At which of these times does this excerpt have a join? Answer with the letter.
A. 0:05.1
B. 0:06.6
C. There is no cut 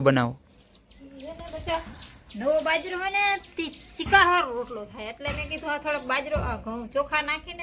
C